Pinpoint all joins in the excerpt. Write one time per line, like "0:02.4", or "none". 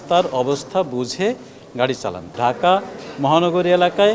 0:02.3